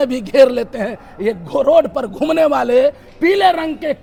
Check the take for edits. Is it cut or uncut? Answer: uncut